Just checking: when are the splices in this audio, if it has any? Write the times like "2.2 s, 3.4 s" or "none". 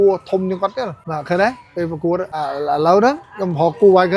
1.1 s, 2.3 s